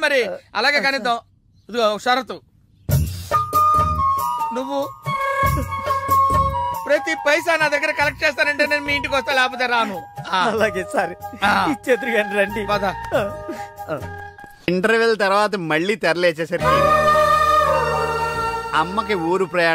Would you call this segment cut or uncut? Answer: cut